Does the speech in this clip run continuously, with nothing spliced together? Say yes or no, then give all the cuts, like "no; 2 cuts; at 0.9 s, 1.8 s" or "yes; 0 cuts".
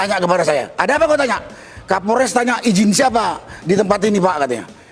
yes; 0 cuts